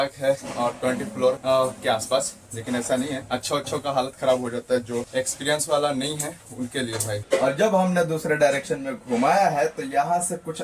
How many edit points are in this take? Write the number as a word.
four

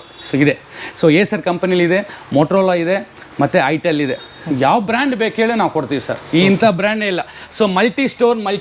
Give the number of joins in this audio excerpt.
zero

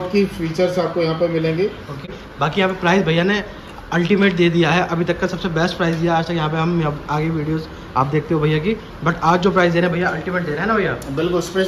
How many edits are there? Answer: one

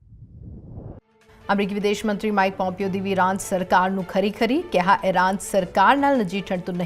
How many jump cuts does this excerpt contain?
one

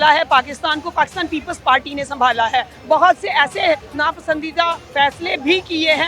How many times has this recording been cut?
three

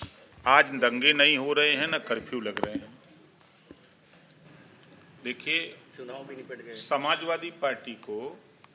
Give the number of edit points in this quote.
one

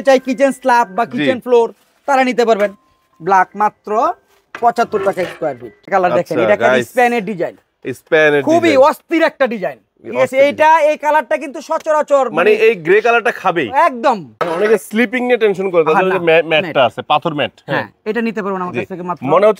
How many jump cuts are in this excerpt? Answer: two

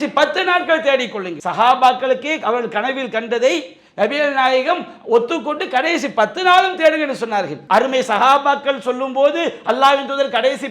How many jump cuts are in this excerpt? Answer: two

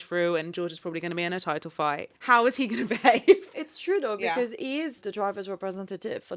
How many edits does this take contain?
two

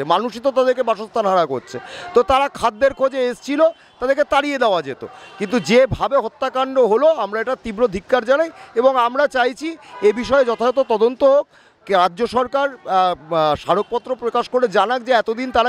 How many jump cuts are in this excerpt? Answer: zero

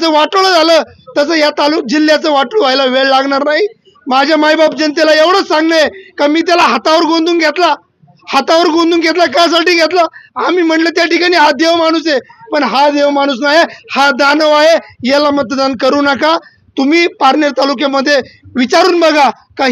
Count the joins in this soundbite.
zero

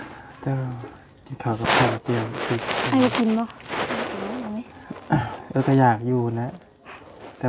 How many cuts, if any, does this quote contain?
zero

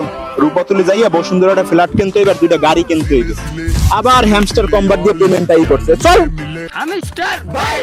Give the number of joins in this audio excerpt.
one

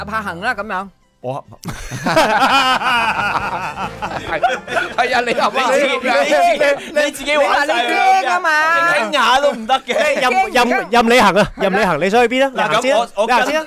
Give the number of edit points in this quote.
zero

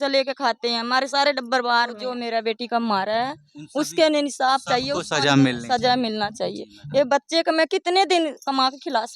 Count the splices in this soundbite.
one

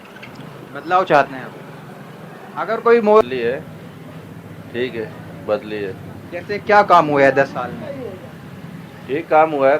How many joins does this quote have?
one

